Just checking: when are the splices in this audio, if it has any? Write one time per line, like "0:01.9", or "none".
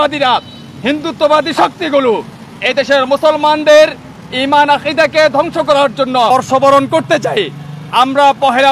0:06.3